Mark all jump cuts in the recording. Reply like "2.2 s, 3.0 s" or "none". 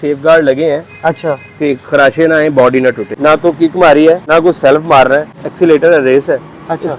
3.1 s, 4.2 s, 5.4 s

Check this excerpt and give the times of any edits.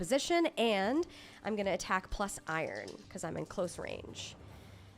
3.0 s

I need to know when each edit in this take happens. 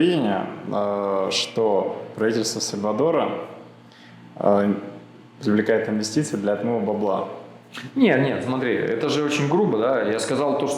none

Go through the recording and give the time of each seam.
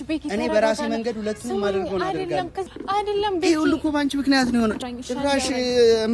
2.6 s, 4.8 s

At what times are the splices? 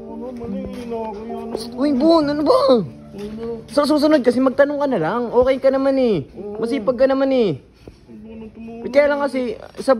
none

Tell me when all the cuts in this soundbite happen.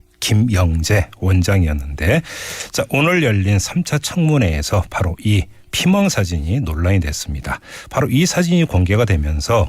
8.5 s

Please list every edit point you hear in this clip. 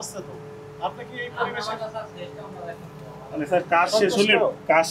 none

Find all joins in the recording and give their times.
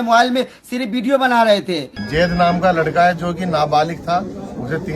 1.9 s

